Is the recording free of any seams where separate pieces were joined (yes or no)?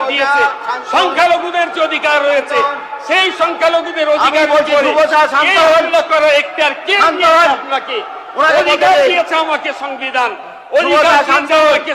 yes